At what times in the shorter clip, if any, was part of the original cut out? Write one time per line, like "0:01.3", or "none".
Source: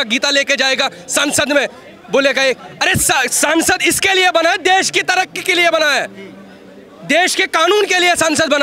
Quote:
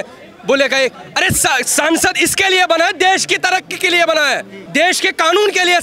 0:04.5

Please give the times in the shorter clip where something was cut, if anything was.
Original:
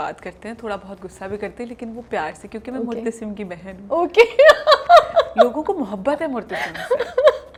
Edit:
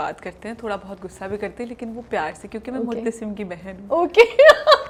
none

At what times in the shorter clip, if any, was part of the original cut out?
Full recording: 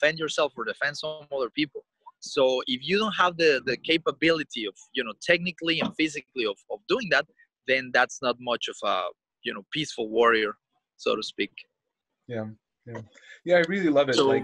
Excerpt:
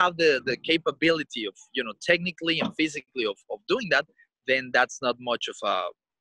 none

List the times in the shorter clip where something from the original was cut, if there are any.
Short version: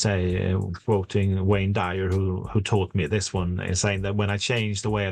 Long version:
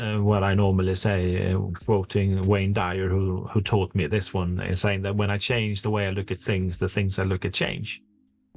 none

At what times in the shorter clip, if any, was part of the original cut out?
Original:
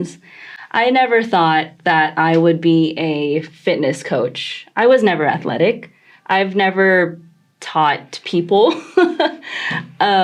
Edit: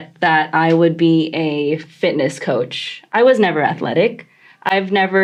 none

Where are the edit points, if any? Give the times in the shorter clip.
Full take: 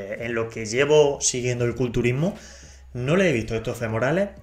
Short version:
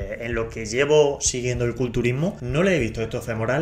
0:02.4

